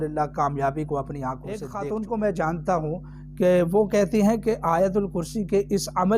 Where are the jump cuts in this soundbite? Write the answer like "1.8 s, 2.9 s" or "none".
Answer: 1.7 s